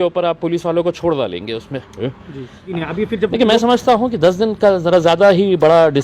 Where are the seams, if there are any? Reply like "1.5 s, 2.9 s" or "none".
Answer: 2.7 s